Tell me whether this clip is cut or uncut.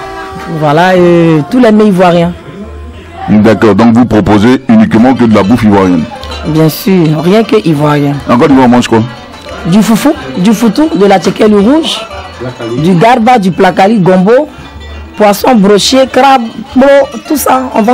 uncut